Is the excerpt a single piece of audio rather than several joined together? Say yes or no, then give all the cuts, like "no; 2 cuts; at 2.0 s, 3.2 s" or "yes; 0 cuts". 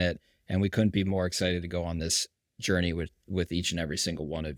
yes; 0 cuts